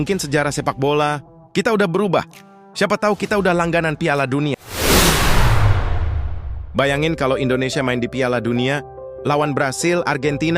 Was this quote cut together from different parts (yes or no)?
yes